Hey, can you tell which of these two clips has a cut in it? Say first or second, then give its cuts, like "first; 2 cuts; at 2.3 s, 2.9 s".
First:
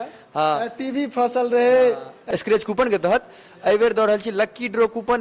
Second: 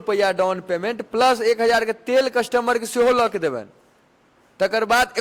first; 1 cut; at 2.1 s